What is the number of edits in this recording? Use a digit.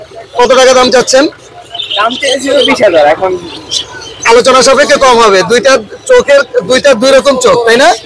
0